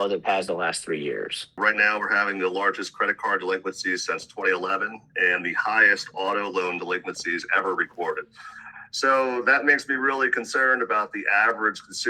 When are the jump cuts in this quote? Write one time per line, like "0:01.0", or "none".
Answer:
0:01.6